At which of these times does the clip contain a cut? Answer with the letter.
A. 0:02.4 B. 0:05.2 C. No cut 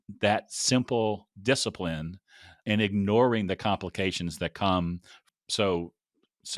B